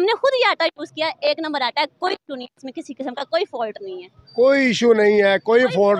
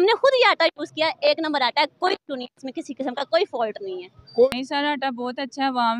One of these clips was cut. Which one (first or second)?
second